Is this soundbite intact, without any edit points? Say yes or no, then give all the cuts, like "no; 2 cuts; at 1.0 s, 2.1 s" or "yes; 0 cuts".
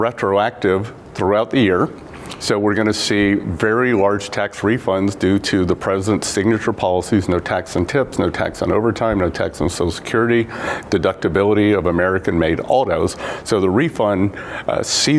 no; 2 cuts; at 9.0 s, 10.8 s